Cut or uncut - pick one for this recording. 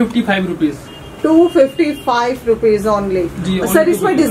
uncut